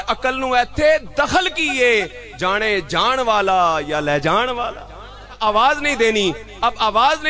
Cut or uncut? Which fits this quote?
cut